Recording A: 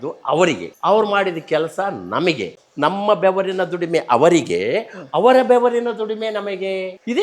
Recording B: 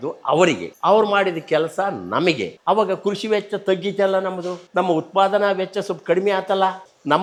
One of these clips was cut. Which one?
A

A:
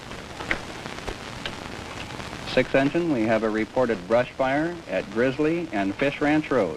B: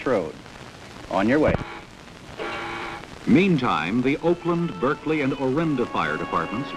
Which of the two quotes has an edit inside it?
A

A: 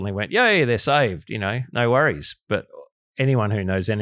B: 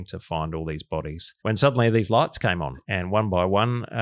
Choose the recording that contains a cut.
B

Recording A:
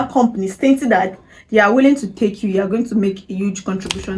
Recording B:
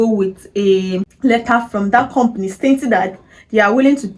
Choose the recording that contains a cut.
B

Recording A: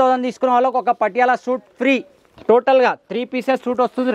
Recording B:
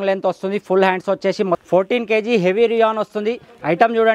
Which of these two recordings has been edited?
B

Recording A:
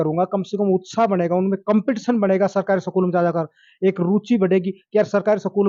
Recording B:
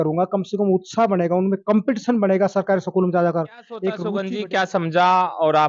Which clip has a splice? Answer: B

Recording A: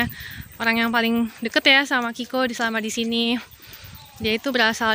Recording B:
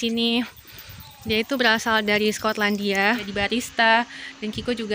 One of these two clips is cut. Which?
B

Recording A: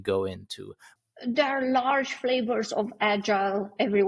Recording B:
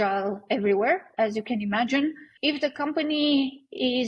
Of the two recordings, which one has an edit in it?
B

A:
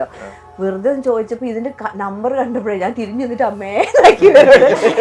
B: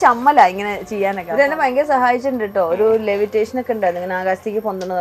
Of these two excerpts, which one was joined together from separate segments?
B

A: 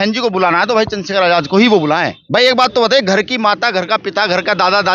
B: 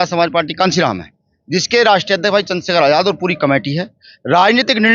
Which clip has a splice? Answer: A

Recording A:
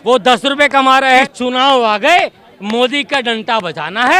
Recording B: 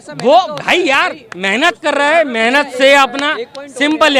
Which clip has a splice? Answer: A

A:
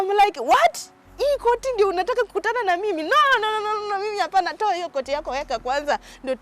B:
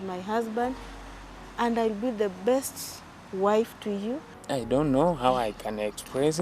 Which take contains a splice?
B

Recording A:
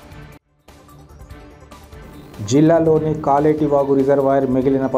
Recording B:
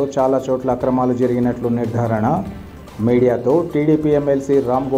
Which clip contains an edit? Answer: A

